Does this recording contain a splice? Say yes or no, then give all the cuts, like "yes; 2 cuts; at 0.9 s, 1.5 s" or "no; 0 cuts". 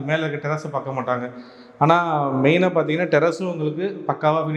no; 0 cuts